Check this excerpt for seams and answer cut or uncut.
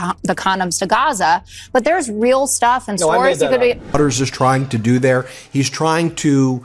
cut